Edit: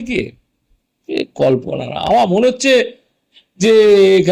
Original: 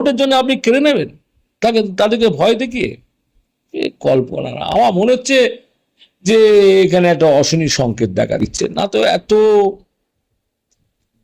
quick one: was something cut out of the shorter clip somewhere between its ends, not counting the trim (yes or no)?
no